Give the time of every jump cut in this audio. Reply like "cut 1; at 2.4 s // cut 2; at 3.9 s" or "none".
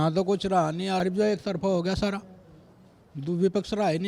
cut 1; at 1.0 s